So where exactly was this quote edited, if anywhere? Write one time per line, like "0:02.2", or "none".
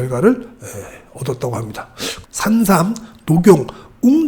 0:02.1